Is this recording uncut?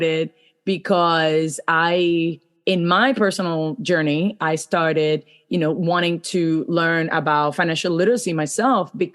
yes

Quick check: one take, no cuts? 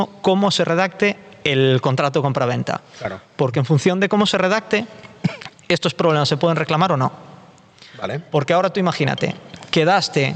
yes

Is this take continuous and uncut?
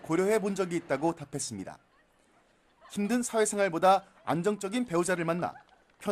no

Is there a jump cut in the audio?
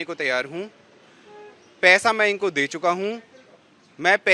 no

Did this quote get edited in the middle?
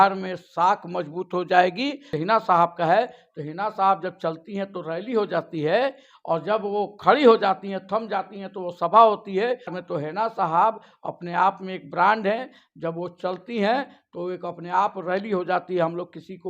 yes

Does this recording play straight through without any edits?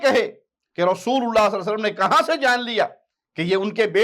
yes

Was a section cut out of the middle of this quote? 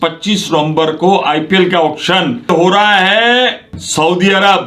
yes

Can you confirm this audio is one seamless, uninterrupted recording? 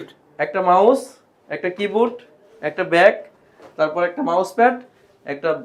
yes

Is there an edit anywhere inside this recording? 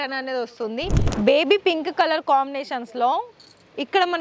yes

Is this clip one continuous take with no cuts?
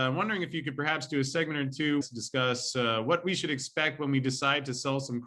no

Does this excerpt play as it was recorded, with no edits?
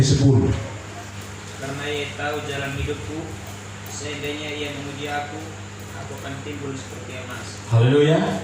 no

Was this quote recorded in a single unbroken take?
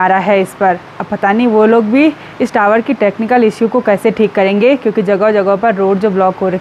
yes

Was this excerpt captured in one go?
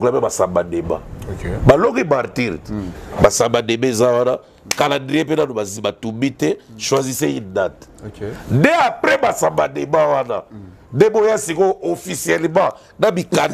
yes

